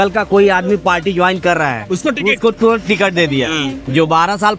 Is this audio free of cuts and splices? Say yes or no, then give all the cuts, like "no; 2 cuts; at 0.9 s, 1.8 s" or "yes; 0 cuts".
yes; 0 cuts